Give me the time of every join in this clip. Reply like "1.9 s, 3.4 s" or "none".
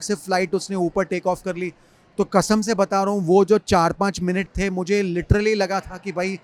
none